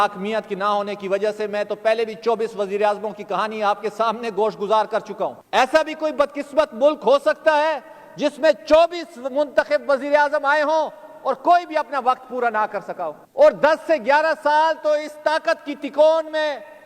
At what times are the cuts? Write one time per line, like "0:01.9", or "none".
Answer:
0:05.4
0:13.2